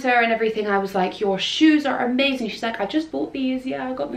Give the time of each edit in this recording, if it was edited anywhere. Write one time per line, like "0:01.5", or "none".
none